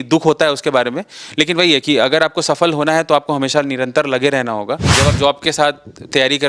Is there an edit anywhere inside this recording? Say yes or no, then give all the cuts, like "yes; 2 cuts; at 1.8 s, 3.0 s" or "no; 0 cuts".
yes; 1 cut; at 4.9 s